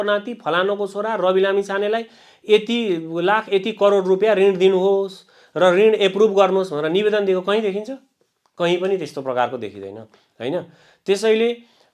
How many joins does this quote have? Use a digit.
0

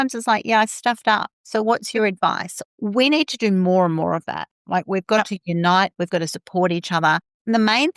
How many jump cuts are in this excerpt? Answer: 2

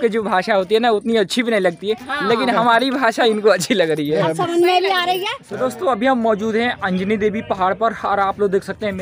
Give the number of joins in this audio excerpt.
1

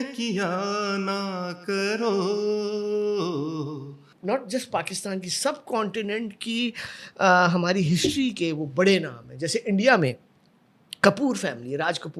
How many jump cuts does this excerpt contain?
1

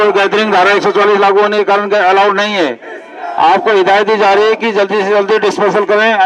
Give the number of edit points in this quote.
0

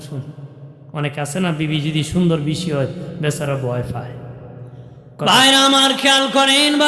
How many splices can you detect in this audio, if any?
1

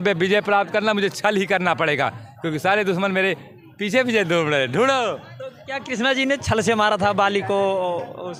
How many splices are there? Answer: 0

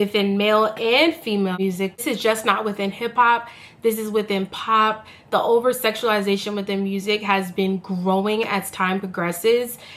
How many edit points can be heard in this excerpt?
1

